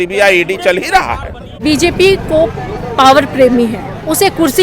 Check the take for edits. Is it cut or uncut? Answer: cut